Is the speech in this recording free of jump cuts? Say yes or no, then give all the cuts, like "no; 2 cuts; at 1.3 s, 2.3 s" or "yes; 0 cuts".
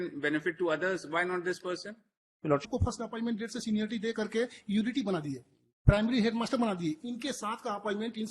no; 1 cut; at 2.6 s